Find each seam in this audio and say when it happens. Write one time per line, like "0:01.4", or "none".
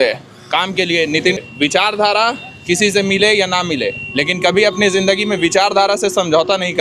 0:01.4